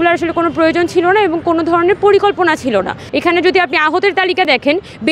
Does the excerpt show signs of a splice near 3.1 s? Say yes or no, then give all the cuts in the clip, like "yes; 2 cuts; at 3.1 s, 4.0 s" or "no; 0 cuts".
yes; 1 cut; at 3.1 s